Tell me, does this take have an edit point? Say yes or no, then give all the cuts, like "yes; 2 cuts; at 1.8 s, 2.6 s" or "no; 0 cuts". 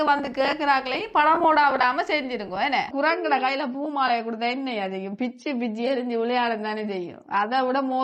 yes; 1 cut; at 2.9 s